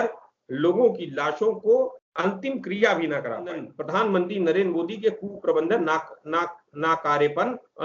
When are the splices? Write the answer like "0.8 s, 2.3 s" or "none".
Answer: 2.0 s, 3.8 s